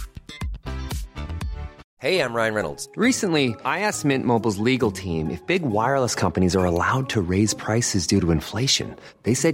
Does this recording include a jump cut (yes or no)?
yes